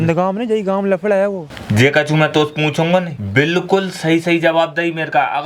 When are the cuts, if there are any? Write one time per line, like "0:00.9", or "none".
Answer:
0:01.5
0:03.2